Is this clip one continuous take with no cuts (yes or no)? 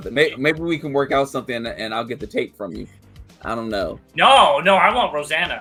yes